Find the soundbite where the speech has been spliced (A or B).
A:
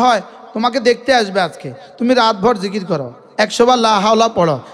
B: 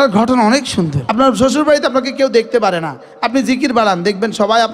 B